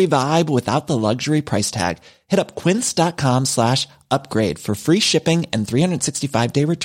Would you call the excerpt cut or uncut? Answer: uncut